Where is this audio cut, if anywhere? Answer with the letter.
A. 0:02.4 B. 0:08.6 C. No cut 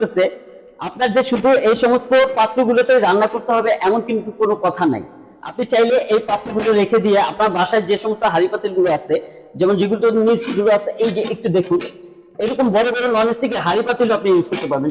C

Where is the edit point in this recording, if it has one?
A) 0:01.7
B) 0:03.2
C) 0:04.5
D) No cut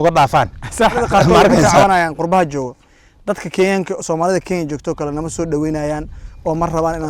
A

